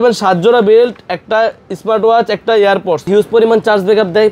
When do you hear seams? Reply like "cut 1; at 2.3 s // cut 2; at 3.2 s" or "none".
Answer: cut 1; at 3.0 s